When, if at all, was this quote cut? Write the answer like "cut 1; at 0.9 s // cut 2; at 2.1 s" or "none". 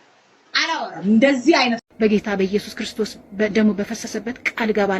cut 1; at 1.8 s